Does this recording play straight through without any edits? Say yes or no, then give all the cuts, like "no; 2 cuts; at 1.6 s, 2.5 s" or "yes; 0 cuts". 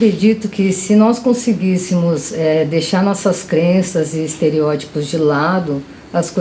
yes; 0 cuts